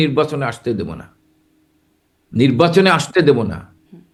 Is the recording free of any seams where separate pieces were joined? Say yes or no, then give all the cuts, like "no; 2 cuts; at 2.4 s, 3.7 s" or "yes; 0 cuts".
yes; 0 cuts